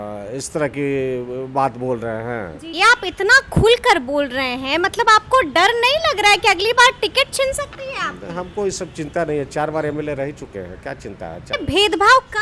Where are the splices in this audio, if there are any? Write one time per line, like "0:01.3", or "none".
0:02.7
0:11.5